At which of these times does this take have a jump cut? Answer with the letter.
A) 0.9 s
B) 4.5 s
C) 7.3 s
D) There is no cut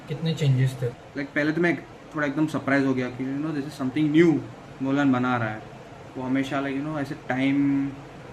A